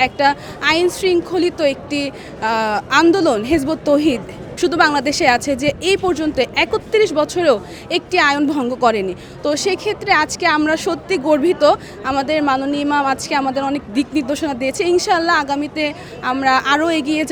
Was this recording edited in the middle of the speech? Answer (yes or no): no